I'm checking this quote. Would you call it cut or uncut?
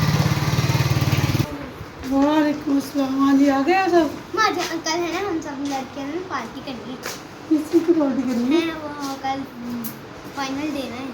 cut